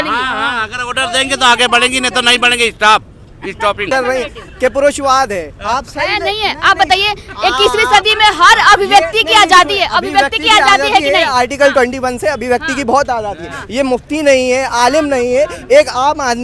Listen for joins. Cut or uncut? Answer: cut